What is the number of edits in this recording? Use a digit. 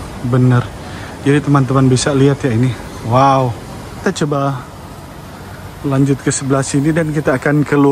1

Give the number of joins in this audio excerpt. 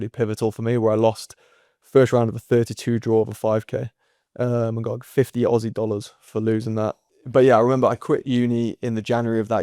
1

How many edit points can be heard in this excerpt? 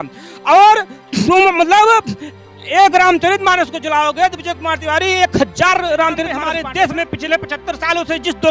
1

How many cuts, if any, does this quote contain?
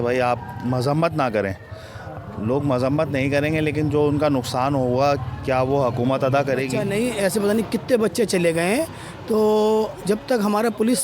1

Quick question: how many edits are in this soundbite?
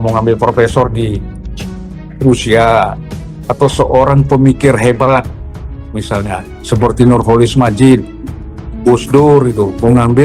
0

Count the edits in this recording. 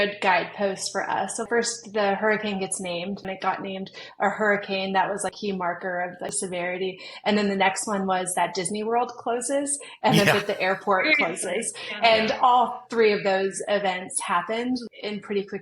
5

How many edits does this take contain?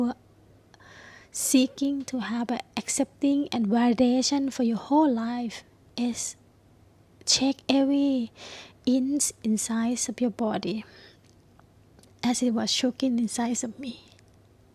1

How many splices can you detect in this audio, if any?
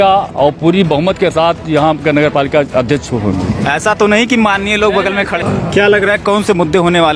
1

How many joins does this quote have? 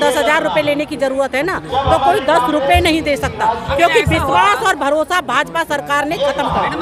0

